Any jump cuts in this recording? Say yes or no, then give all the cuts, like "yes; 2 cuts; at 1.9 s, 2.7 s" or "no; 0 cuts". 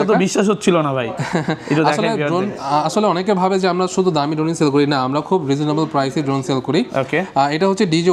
no; 0 cuts